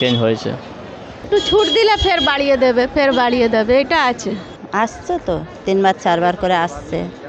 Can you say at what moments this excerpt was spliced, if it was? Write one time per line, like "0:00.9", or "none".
0:01.2
0:04.5